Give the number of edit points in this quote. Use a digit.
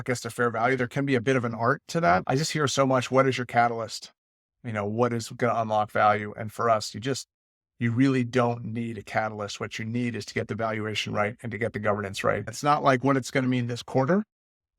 2